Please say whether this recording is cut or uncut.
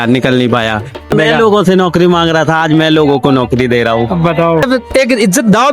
cut